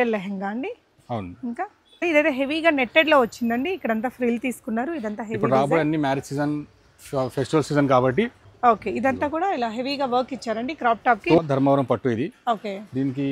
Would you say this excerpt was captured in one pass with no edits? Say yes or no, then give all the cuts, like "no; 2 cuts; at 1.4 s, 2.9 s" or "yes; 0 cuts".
no; 3 cuts; at 2.0 s, 8.4 s, 11.4 s